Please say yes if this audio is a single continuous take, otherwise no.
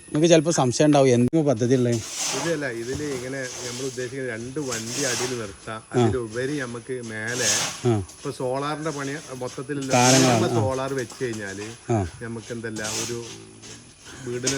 no